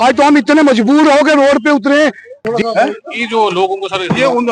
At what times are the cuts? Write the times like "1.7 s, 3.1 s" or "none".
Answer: 2.6 s

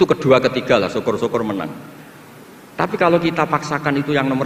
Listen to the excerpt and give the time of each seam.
none

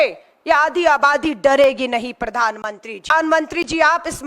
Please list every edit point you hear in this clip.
3.1 s

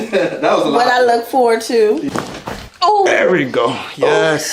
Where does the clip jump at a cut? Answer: 2.0 s

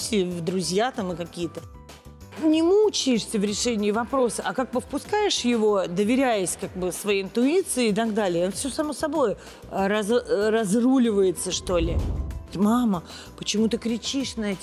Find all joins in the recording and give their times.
1.8 s, 12.4 s

